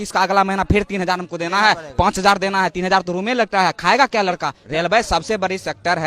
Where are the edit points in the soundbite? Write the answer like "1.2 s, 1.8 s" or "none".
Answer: 4.6 s